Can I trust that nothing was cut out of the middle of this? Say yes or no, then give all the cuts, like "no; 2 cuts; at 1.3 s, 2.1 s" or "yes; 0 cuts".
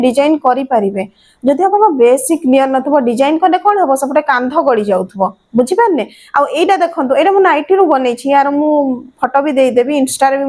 yes; 0 cuts